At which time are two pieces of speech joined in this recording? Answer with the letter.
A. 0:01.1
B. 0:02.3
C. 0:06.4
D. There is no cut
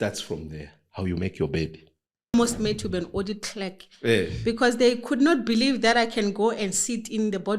B